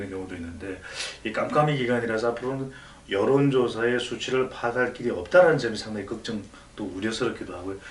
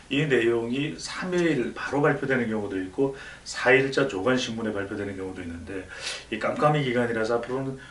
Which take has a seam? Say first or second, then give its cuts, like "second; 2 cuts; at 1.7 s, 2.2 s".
second; 1 cut; at 1.4 s